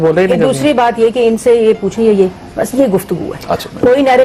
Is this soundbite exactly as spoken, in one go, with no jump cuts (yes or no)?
yes